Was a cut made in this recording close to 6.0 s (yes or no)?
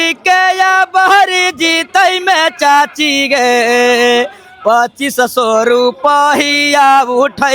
no